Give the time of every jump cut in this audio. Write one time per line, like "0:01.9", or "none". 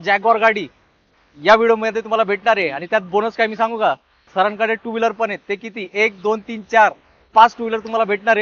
none